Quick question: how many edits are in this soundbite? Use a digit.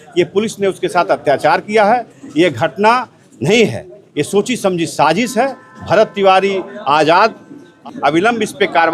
1